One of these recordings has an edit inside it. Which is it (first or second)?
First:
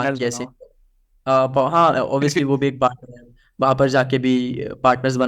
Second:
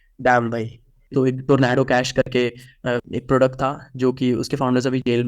second